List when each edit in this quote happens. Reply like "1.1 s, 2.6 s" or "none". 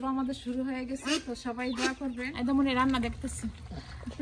2.3 s